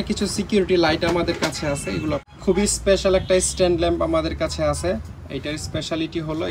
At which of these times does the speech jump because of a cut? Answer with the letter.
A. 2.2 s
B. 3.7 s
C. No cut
A